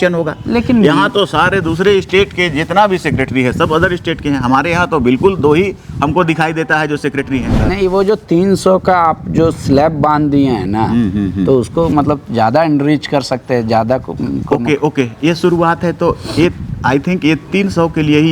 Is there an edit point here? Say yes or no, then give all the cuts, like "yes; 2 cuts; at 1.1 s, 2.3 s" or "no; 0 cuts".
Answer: yes; 1 cut; at 7.6 s